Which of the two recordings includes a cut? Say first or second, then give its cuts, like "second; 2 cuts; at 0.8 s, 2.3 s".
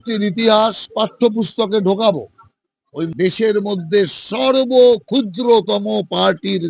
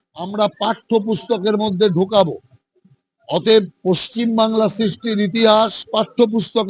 first; 1 cut; at 3.1 s